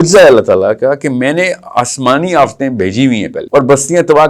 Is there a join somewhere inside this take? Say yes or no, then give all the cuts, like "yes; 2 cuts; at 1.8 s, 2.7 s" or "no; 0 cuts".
yes; 1 cut; at 3.4 s